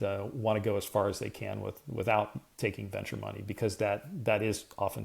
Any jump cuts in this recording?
no; 0 cuts

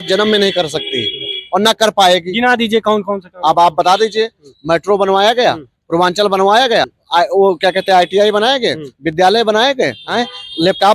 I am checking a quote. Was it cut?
yes; 2 cuts; at 7.0 s, 10.0 s

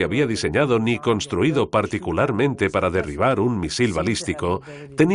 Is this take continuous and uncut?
no; 1 cut; at 2.5 s

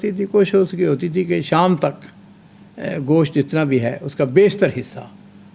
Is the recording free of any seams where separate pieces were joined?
yes; 0 cuts

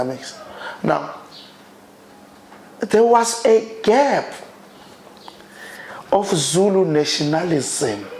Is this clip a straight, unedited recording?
yes; 0 cuts

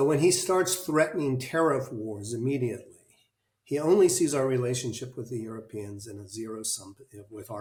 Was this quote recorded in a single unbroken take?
yes; 0 cuts

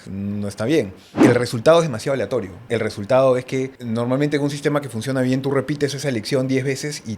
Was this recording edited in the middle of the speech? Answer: yes; 3 cuts; at 1.2 s, 2.6 s, 3.8 s

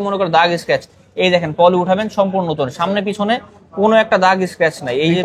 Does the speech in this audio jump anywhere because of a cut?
no; 0 cuts

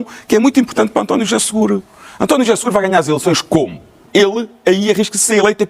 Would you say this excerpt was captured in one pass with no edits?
no; 1 cut; at 4.1 s

